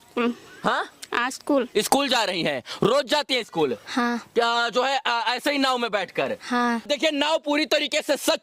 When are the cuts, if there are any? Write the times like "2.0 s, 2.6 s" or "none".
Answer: none